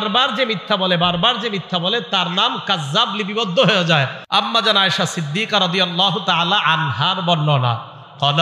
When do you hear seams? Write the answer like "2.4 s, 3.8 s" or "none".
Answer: 4.2 s